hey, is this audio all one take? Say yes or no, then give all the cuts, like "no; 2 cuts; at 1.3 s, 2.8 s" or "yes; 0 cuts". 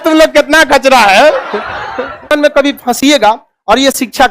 no; 1 cut; at 2.3 s